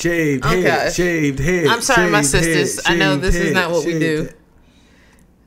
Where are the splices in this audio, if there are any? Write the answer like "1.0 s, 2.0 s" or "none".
none